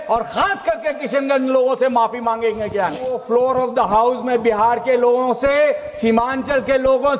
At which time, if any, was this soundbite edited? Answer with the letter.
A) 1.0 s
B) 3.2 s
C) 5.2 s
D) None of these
B